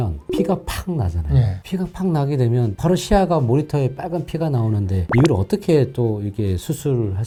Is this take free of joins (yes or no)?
yes